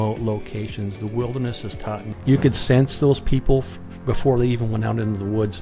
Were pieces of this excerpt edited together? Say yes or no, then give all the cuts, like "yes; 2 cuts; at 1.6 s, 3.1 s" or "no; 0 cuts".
yes; 1 cut; at 2.1 s